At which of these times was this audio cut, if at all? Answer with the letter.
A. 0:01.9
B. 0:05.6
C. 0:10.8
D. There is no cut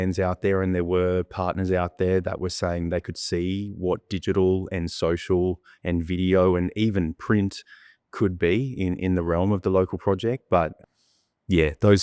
C